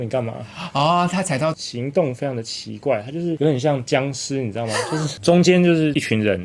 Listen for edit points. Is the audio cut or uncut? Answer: cut